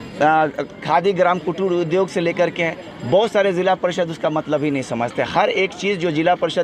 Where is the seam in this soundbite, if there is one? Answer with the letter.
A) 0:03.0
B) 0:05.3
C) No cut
C